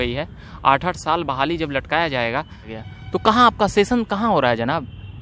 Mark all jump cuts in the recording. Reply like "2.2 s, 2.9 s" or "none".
2.6 s